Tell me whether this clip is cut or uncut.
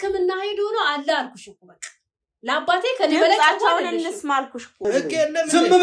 cut